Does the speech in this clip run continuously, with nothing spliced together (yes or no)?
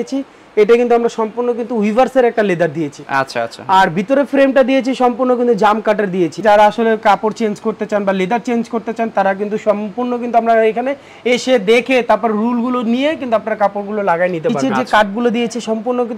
no